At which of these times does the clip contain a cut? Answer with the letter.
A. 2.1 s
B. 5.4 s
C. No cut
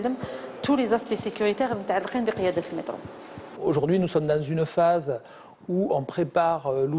A